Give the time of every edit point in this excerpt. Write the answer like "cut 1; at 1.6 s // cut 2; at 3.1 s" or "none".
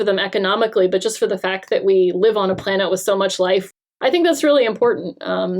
cut 1; at 3.7 s